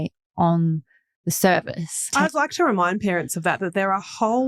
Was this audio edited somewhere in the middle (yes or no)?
no